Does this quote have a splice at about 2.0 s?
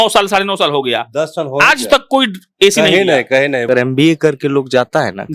no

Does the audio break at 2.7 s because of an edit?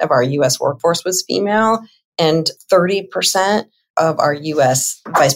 no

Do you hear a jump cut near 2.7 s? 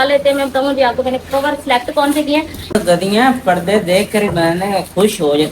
yes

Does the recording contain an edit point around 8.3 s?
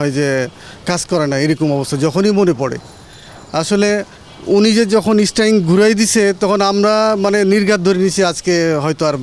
no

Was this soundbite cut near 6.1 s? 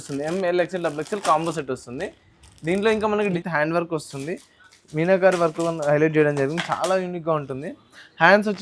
no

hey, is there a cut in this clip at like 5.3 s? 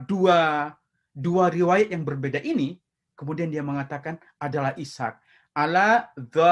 no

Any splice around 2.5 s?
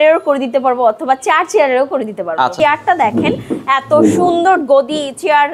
yes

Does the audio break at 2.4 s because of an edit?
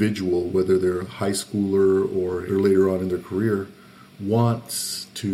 yes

